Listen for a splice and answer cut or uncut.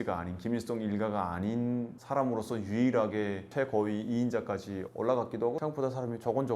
cut